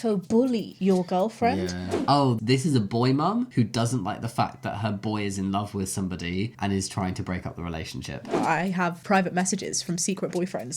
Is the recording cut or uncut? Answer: cut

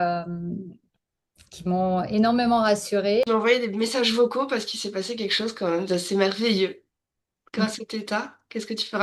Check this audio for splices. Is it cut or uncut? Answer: cut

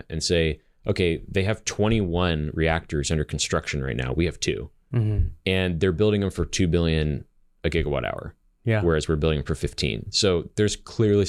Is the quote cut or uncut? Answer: uncut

